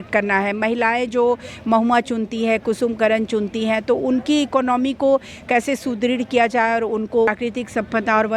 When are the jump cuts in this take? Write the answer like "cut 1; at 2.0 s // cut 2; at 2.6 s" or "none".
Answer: cut 1; at 7.3 s